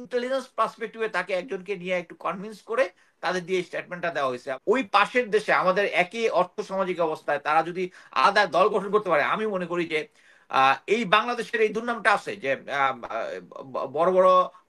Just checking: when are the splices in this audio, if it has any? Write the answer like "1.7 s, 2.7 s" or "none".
4.5 s